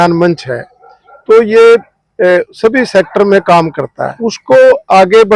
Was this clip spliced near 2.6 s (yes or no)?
no